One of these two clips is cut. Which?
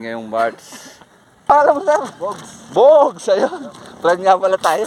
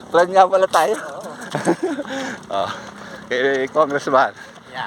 first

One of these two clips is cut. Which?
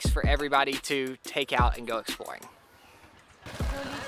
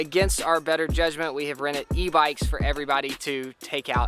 first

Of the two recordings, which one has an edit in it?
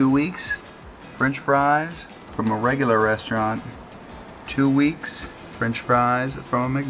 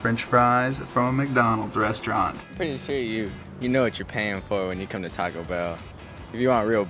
second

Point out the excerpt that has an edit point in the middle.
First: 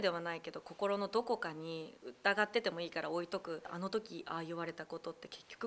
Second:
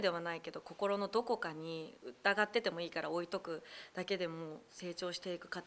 first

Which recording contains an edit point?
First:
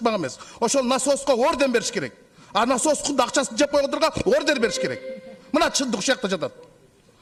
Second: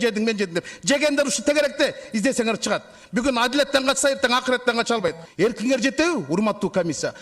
second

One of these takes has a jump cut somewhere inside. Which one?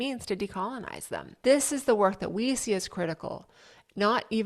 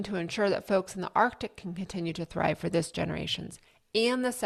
first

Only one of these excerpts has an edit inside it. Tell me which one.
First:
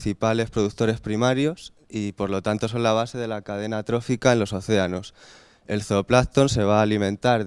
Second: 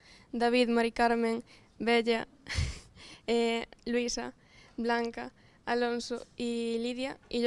first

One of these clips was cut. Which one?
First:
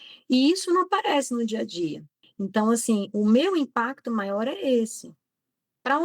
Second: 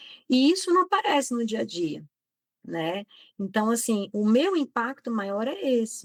first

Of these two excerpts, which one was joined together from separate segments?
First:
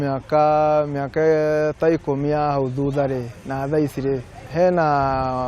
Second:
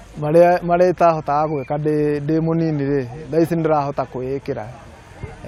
first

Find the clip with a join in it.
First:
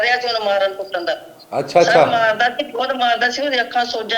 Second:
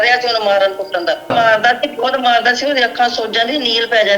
second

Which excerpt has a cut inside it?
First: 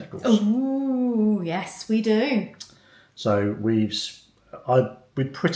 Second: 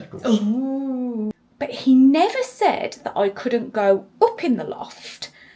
second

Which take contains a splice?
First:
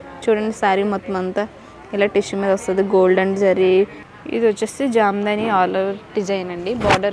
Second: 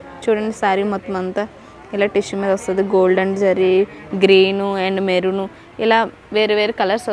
first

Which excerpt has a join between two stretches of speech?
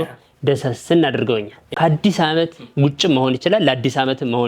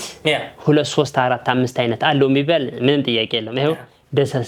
first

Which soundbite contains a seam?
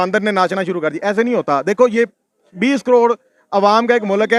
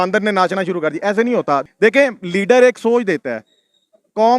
second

